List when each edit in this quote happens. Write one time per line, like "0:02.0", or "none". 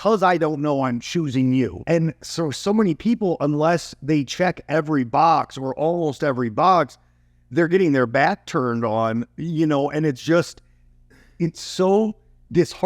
0:01.8

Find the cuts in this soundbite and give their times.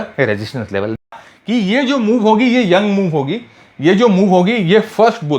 0:01.0

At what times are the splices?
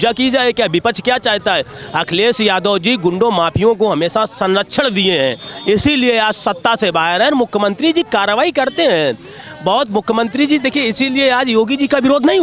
none

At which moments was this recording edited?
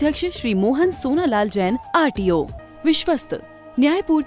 0:02.6

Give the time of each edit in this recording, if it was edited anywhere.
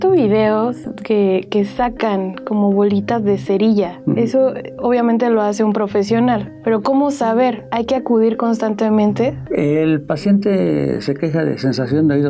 0:06.5

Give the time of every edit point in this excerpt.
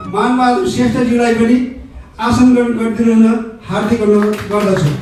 none

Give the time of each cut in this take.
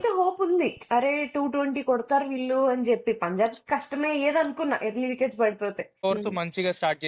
0:06.0

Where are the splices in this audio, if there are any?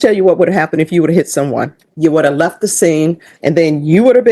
0:01.8
0:03.3

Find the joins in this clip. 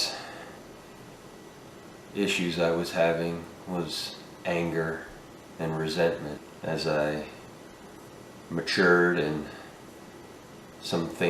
0:06.5

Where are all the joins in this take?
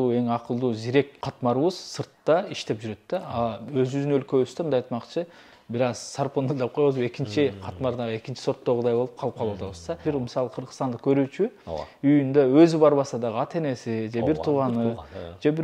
0:10.0

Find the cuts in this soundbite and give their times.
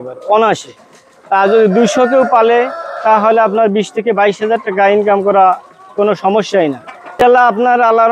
0:07.2

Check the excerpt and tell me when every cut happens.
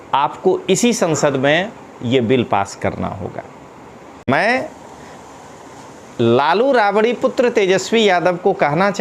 0:04.3

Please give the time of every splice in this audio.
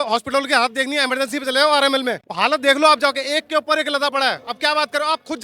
0:02.2
0:04.4

